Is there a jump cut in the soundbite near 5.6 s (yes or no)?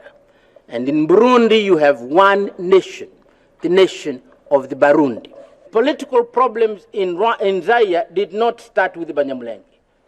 yes